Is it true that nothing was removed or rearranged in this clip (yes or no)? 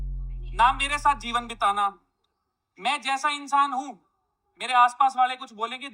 yes